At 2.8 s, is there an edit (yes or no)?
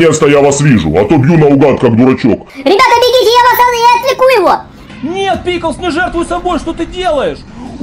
no